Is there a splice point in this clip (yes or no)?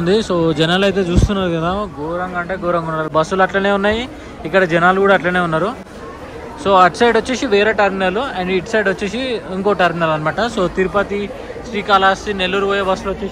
no